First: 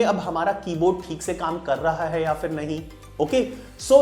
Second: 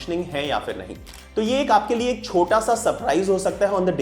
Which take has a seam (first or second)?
second